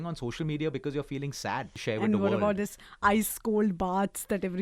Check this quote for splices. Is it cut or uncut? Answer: cut